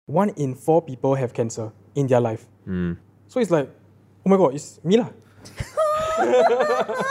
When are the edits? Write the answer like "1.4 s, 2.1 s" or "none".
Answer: none